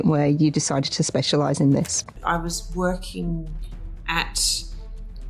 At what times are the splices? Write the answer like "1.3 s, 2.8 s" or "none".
2.2 s